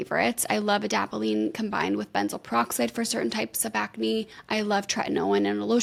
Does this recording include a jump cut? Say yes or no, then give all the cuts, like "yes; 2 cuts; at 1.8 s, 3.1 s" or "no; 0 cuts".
no; 0 cuts